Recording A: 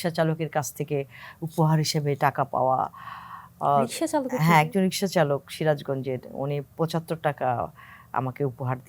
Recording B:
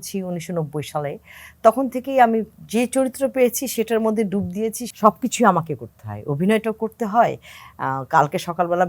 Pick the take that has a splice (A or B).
B